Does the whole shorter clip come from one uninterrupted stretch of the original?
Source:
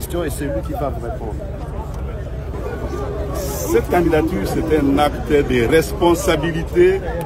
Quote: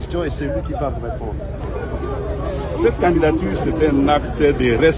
no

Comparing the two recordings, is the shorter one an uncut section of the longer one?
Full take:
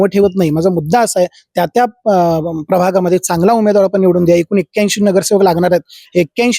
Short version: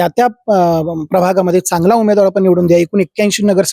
yes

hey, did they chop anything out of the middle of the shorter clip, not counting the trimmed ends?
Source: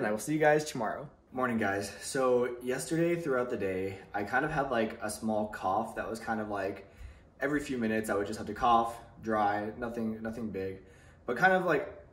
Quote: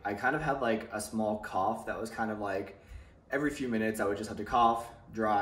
no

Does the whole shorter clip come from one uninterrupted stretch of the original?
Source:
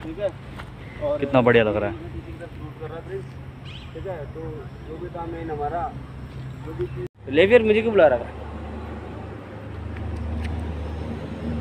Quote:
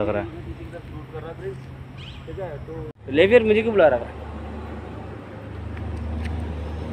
no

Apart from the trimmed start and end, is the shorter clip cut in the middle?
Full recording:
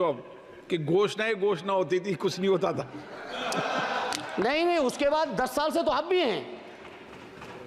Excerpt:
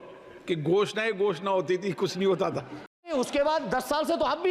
yes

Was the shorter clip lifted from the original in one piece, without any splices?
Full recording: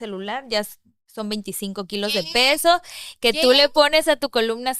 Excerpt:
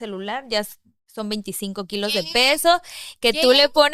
yes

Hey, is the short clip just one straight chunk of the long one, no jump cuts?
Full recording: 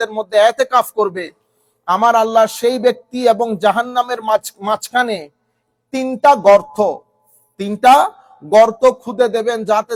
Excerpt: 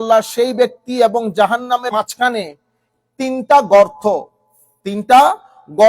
no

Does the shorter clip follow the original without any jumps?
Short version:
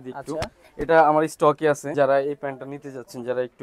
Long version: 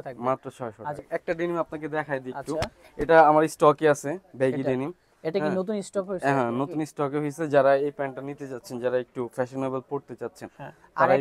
no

